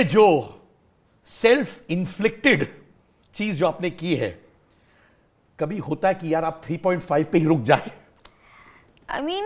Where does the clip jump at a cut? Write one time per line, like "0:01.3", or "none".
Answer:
none

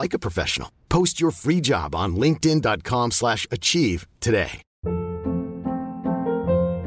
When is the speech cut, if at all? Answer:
0:04.6

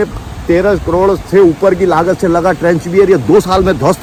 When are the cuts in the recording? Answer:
none

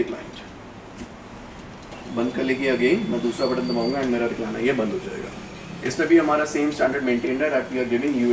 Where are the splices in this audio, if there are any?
none

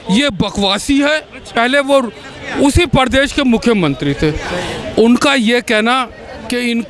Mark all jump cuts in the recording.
0:01.5

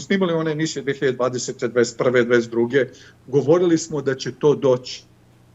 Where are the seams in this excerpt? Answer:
none

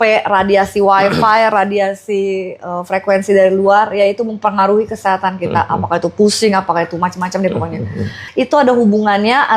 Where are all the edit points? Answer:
0:08.2

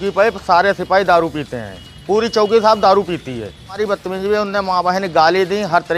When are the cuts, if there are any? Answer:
0:03.8

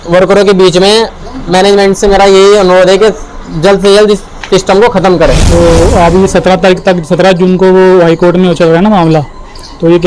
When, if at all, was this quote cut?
0:05.4

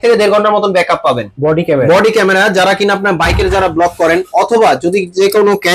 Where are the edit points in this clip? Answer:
0:01.3

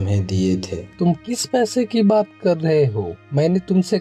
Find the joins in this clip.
none

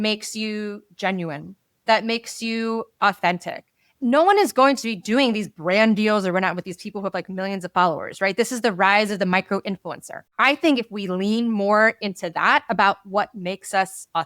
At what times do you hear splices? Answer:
0:03.8
0:10.2

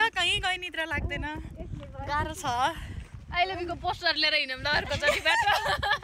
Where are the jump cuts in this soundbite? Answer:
none

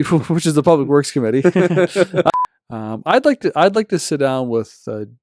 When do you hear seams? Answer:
0:02.3

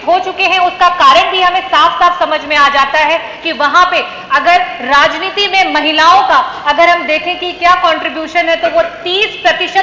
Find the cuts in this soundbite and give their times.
none

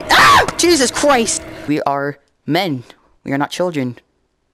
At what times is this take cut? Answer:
0:01.6

